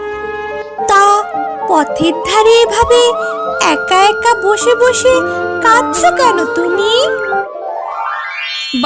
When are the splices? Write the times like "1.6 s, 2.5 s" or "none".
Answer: 7.4 s

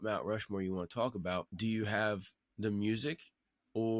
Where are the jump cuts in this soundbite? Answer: 1.5 s

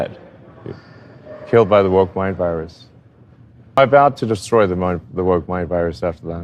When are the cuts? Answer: 3.8 s

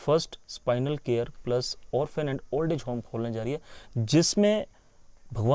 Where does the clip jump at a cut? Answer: none

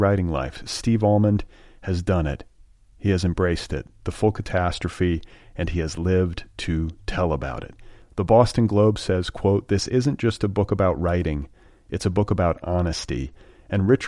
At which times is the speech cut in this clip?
none

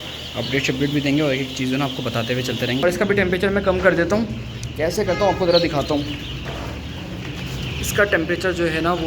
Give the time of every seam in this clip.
2.8 s

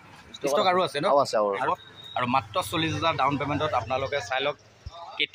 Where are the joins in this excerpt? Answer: 1.7 s

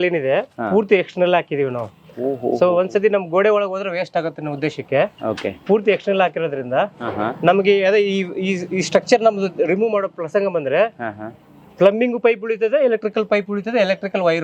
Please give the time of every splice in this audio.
none

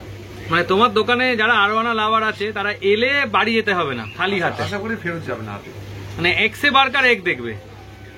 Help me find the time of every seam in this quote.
none

